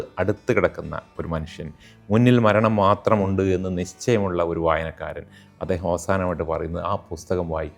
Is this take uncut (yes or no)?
yes